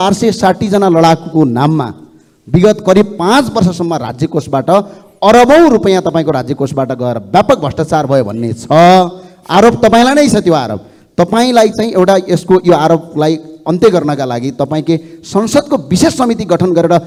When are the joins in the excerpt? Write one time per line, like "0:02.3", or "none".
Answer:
none